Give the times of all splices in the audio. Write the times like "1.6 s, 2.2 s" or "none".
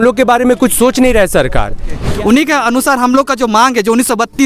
2.1 s